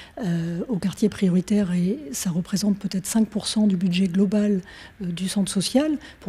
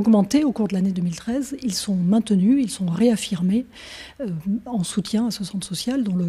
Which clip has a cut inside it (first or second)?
first